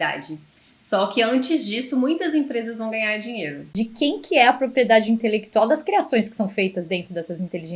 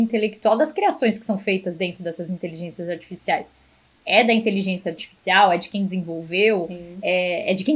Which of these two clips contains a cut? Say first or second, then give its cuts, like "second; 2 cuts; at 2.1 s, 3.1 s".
first; 1 cut; at 3.7 s